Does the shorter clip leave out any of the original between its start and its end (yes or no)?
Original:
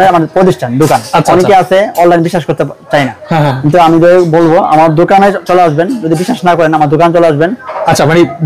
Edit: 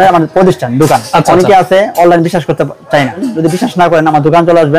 yes